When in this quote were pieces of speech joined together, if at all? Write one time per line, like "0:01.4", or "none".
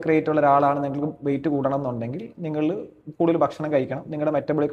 none